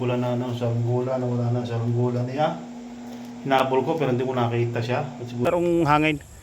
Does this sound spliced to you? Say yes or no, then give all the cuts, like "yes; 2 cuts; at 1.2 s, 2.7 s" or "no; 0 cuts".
yes; 1 cut; at 5.5 s